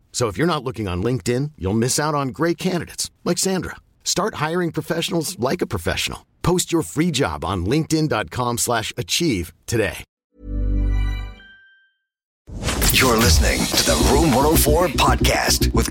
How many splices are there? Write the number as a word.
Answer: one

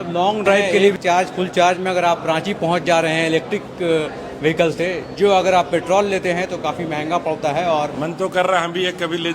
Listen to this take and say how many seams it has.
two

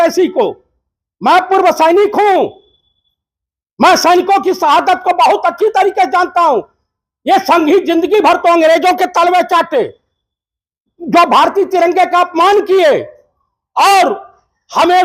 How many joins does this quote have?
zero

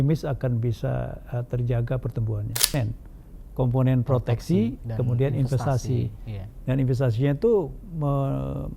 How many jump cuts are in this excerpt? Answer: one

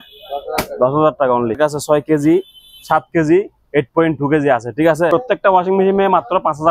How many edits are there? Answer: two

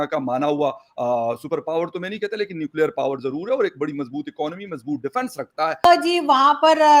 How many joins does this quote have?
one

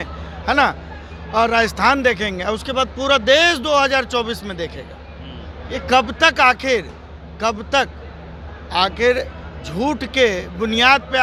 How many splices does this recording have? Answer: zero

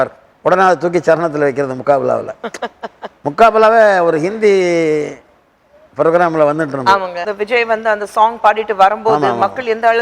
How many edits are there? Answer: one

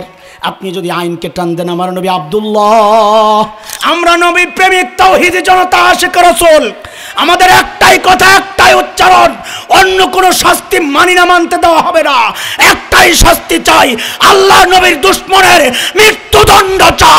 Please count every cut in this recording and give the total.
one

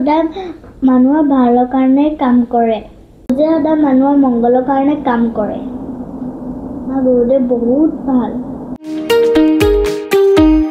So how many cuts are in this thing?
one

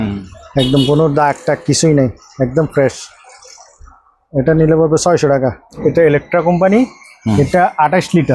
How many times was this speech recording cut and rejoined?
one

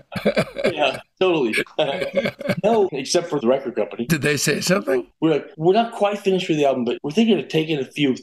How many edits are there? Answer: three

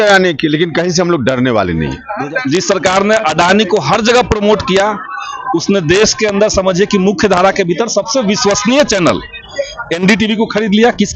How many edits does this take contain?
one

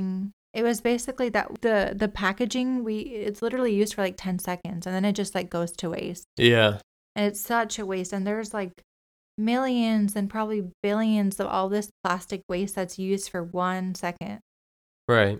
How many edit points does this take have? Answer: one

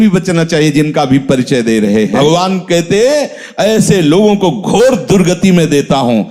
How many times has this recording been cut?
one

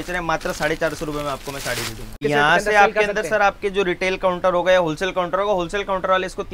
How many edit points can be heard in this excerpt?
one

